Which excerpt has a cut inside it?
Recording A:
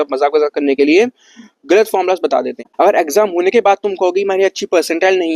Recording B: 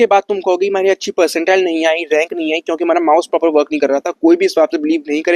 A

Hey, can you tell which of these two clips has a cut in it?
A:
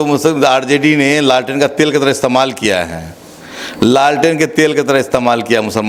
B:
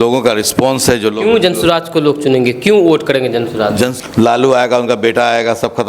B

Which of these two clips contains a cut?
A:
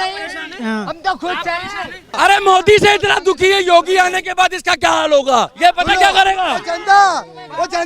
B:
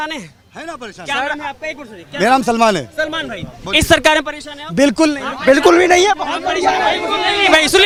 A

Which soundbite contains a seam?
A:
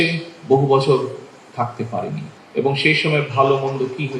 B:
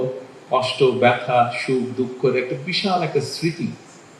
A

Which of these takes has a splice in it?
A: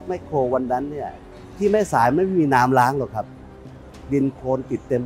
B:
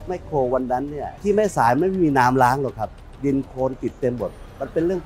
B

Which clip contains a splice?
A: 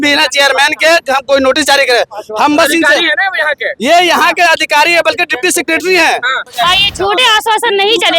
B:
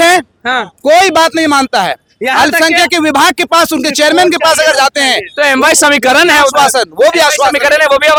A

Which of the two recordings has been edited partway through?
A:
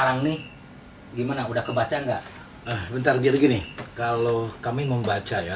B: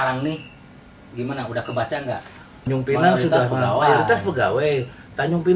B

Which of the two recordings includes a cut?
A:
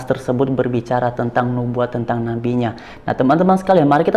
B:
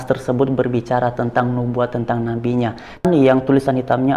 B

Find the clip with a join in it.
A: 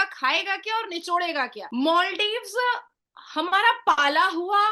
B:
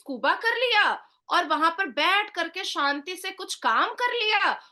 A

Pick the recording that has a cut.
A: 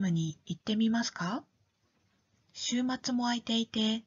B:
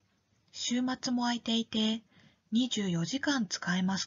B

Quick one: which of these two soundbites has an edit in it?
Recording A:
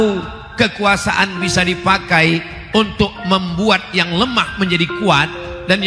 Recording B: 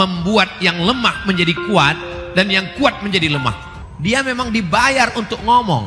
B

